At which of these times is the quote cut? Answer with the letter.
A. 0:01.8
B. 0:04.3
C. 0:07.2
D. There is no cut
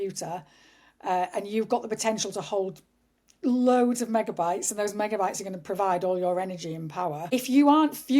C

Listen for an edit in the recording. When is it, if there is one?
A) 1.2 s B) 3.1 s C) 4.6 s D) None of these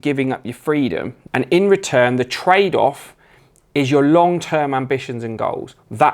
A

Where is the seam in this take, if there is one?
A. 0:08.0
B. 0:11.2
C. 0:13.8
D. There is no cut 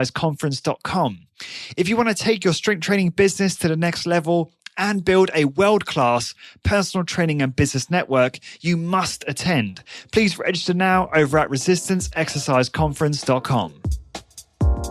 C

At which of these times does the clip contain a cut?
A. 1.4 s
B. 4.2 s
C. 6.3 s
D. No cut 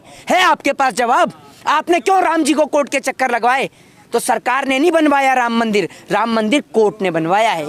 D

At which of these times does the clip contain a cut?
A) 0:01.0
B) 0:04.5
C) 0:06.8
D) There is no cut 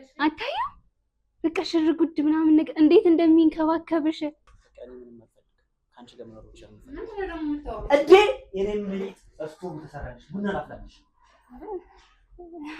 B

